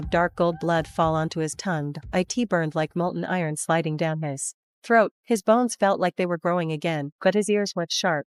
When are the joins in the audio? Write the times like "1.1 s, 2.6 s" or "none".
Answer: none

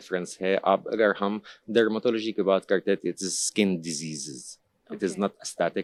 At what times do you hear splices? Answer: none

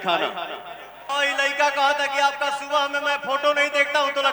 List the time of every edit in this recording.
1.1 s

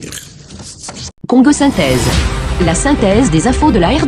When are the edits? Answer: 1.3 s

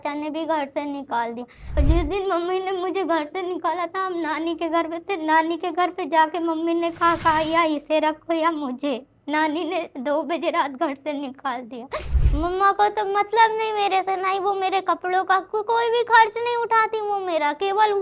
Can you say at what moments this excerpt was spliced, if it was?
1.8 s, 12.2 s

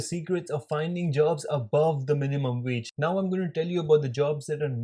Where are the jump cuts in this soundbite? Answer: 2.9 s

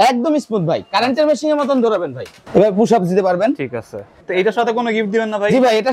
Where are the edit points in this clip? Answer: 2.4 s, 4.1 s

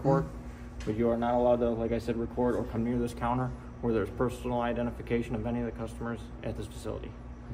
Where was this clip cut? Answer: none

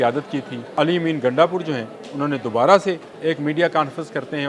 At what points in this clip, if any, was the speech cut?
0.7 s, 3.1 s

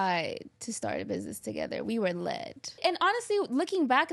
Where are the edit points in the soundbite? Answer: 2.8 s

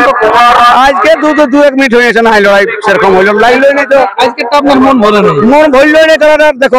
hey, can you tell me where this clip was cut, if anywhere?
none

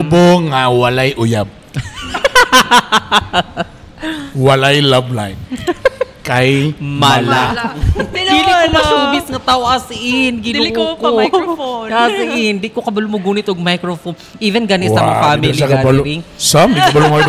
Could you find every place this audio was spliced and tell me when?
8.2 s

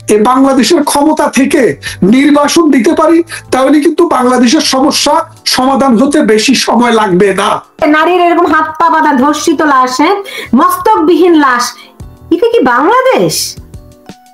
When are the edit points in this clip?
7.7 s, 13.4 s

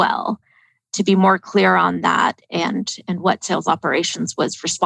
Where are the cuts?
none

